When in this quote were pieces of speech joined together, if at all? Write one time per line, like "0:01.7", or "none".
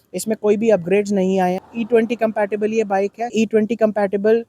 0:01.6
0:03.3